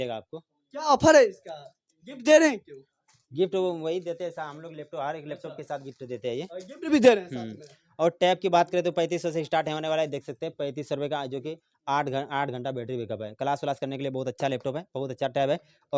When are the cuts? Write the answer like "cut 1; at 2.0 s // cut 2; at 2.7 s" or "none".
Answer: none